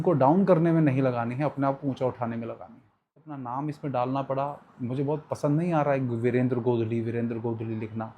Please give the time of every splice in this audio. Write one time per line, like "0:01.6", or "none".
0:03.3